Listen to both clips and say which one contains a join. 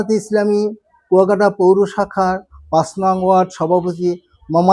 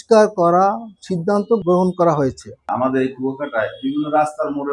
second; 2 cuts; at 1.6 s, 2.7 s

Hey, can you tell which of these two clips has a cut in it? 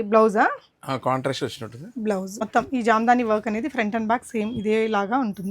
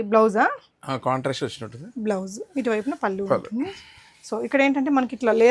first; 1 cut; at 2.4 s

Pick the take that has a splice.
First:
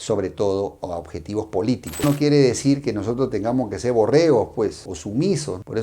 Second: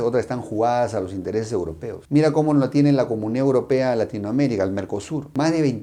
first; 1 cut; at 2.0 s

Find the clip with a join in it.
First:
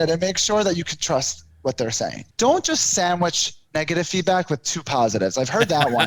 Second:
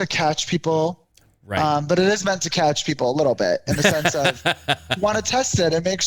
first; 1 cut; at 2.2 s

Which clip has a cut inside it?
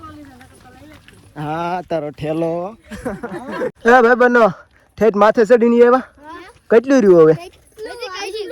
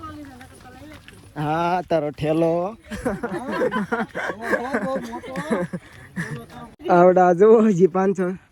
first; 1 cut; at 3.7 s

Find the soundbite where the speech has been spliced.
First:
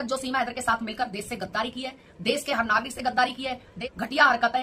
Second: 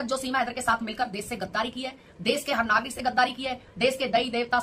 first; 1 cut; at 3.7 s

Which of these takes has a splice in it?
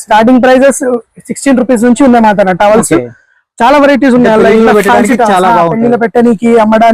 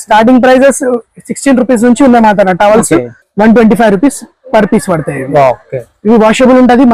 second; 1 cut; at 3.2 s

